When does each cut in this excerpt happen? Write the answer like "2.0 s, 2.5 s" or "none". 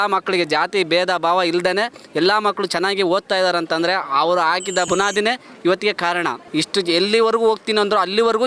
4.9 s, 6.4 s